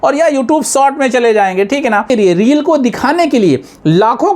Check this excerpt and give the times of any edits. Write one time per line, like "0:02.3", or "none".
0:02.1